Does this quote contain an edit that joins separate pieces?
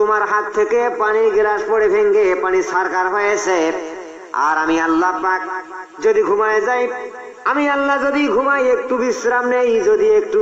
no; 0 cuts

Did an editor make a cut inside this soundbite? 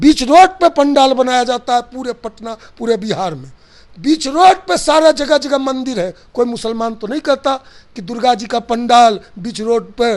no; 0 cuts

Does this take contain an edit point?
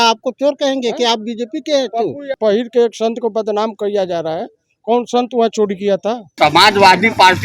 yes; 2 cuts; at 2.3 s, 6.3 s

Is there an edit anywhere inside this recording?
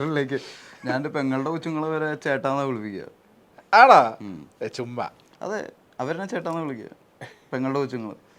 no; 0 cuts

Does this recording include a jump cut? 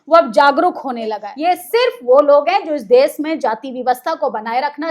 yes; 1 cut; at 1.3 s

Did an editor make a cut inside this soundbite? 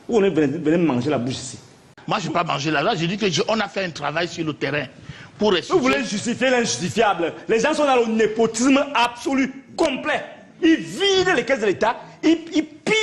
yes; 1 cut; at 2.0 s

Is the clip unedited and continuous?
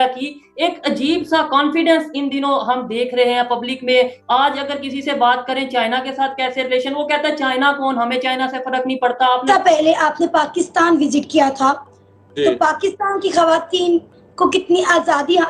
no; 1 cut; at 9.4 s

